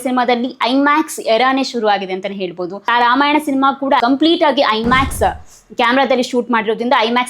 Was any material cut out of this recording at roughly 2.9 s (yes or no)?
yes